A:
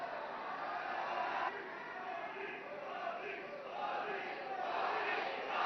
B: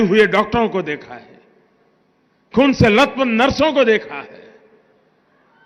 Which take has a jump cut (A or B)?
A